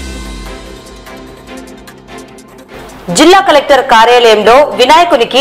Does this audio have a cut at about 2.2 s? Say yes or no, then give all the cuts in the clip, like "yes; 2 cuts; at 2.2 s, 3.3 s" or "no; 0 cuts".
yes; 1 cut; at 2.2 s